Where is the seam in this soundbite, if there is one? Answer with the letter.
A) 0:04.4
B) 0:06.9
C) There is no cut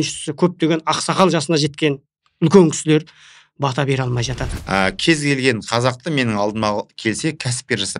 A